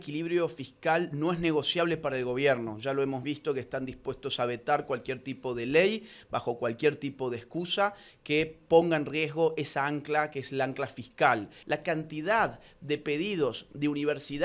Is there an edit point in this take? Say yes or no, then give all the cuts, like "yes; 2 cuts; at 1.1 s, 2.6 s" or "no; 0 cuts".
yes; 1 cut; at 11.5 s